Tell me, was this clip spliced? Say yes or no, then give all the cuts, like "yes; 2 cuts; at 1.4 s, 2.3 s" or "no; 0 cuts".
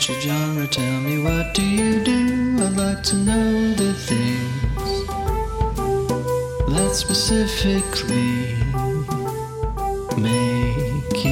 no; 0 cuts